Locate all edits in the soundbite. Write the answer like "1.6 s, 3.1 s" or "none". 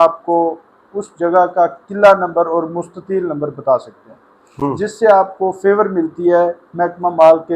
none